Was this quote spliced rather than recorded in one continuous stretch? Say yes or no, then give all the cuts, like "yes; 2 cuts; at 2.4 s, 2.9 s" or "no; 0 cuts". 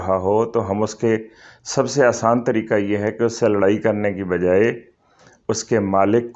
no; 0 cuts